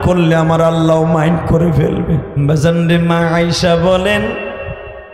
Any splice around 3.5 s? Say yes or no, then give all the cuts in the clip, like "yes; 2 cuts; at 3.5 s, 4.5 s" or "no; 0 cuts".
no; 1 cut; at 2.3 s